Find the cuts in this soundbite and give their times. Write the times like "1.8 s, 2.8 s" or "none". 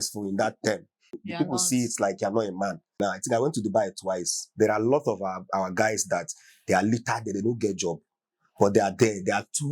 1.2 s, 2.9 s